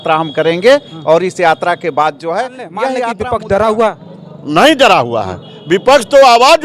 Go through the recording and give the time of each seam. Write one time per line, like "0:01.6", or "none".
0:03.1